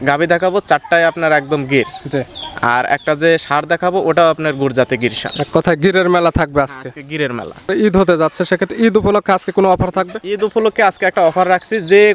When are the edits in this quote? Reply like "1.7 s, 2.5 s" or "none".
7.7 s